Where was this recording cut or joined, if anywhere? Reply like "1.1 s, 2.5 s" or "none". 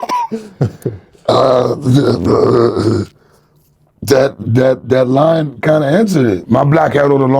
6.4 s